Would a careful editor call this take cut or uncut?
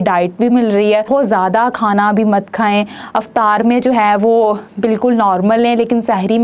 cut